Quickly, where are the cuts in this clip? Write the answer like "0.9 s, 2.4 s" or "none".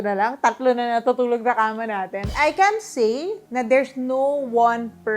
2.3 s